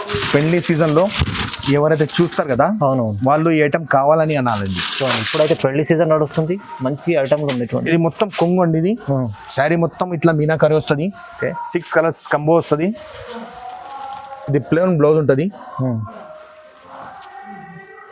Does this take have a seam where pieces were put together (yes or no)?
no